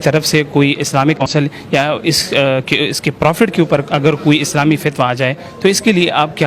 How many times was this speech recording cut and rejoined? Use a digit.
1